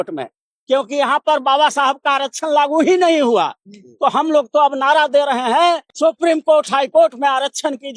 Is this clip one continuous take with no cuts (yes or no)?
no